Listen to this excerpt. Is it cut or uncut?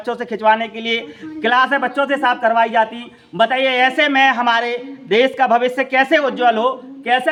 uncut